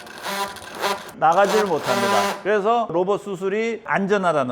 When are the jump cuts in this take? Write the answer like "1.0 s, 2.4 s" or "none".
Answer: 2.9 s